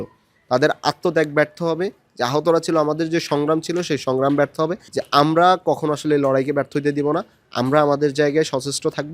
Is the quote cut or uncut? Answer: cut